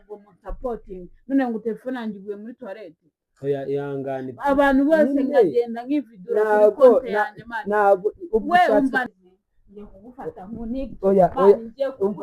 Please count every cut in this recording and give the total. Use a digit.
1